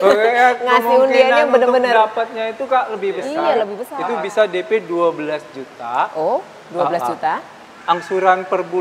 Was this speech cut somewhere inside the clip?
yes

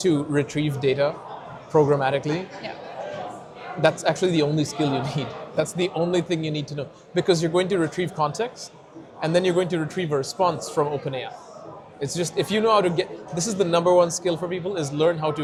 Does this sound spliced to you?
no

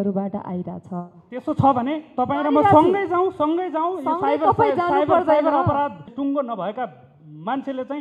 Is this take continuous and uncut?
no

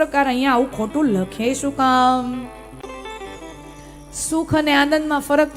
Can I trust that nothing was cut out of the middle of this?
no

